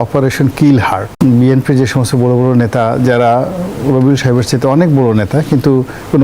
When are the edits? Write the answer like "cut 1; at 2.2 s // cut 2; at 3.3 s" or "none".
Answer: cut 1; at 1.1 s